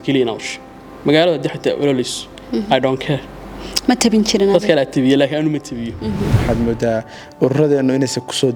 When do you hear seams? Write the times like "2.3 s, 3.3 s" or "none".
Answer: 6.4 s